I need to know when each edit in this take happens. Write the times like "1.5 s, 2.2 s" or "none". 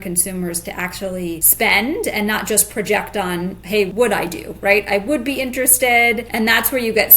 1.5 s, 3.9 s, 6.3 s